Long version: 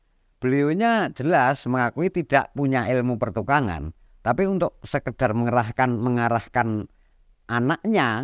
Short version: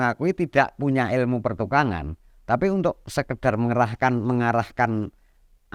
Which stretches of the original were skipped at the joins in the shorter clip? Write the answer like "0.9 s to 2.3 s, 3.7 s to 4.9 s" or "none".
none